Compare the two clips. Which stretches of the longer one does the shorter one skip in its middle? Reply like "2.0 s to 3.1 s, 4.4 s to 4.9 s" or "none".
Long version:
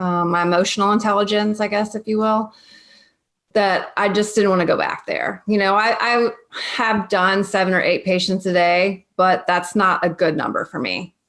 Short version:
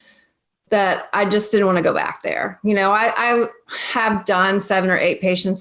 none